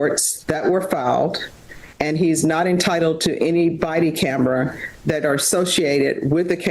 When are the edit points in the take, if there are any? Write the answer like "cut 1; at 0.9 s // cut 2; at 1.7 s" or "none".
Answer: cut 1; at 4.2 s